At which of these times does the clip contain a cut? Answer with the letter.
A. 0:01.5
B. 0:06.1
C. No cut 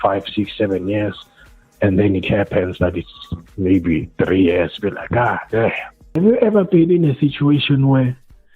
B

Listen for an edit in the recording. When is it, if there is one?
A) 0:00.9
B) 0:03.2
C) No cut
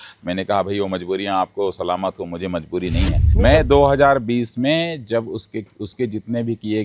B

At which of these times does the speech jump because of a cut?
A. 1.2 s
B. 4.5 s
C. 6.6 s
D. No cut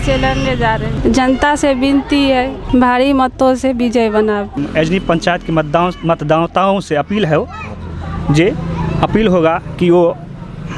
B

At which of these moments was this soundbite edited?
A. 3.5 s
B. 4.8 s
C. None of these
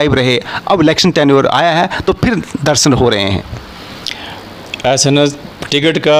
C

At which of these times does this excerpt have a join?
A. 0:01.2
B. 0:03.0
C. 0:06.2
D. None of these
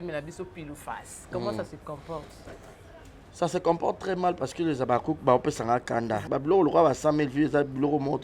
C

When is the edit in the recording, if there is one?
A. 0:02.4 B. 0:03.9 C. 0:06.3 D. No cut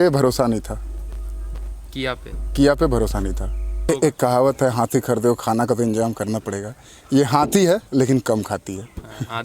B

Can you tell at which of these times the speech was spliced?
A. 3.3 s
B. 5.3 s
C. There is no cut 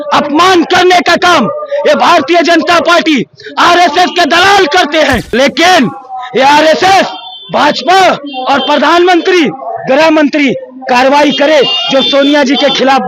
B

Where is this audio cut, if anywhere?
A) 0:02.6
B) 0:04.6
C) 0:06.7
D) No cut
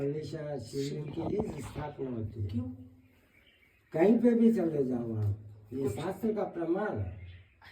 D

